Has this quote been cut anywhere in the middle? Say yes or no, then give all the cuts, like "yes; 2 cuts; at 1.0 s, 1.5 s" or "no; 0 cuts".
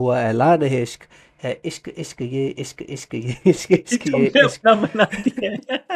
no; 0 cuts